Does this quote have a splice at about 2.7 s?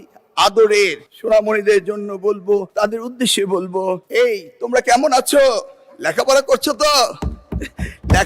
yes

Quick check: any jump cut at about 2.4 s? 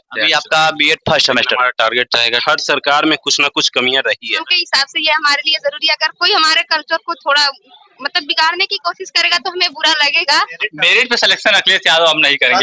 yes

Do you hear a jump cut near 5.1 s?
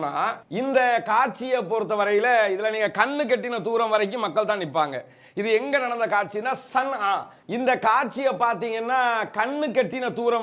no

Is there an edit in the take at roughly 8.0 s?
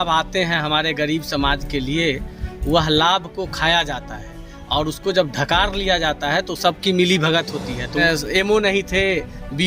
yes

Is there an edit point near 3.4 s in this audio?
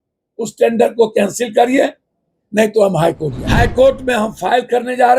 yes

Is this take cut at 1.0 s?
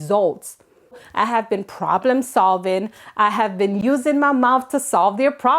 yes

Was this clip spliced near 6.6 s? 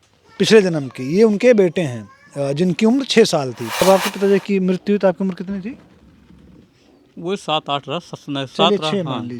no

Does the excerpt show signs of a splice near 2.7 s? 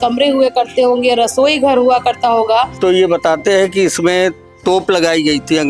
yes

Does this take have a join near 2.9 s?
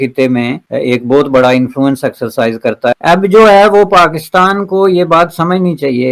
yes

